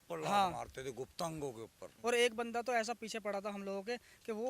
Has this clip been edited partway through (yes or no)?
yes